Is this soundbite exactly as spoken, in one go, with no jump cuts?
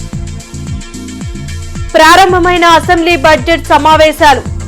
yes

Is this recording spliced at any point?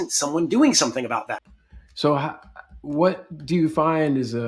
yes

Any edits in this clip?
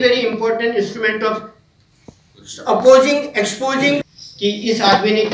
yes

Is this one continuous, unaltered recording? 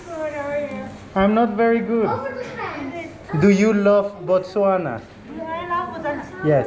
no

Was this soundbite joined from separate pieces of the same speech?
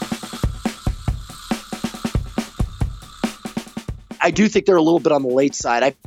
yes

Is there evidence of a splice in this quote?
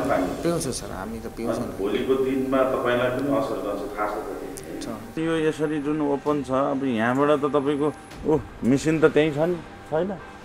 yes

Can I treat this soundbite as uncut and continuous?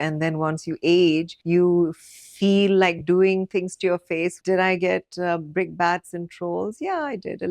no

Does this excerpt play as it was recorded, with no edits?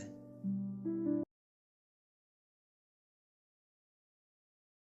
yes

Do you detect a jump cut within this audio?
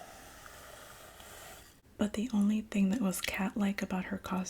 yes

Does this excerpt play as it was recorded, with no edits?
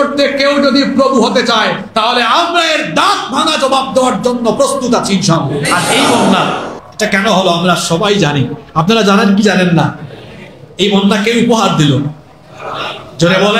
no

